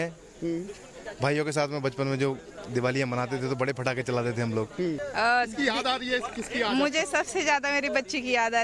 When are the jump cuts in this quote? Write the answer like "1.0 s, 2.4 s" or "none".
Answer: 5.0 s